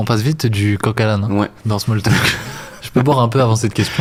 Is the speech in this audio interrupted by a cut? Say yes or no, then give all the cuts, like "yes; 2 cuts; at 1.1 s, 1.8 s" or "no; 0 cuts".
no; 0 cuts